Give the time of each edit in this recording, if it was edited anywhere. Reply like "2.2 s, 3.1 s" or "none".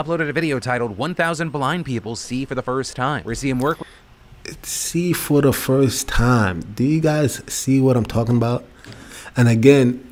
none

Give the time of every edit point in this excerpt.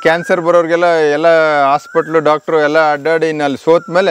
none

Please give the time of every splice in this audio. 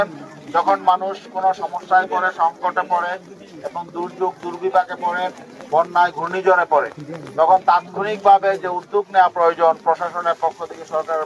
none

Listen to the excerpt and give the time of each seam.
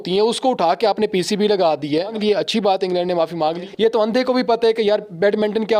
2.1 s, 3.7 s

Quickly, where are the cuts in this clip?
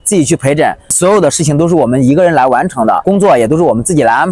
0.9 s, 3.0 s

